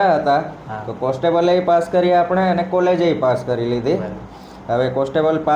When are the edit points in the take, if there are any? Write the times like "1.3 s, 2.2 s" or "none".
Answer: none